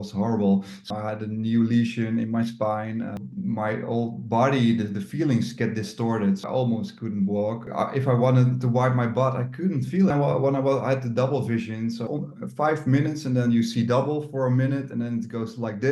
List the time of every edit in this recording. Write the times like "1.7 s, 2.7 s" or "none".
0.9 s, 3.2 s, 6.4 s, 7.6 s, 10.1 s, 12.0 s